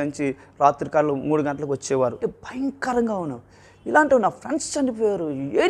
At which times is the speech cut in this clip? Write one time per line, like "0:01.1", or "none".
0:02.2